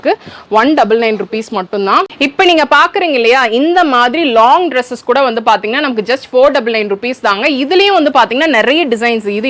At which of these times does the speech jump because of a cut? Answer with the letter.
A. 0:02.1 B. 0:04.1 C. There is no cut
A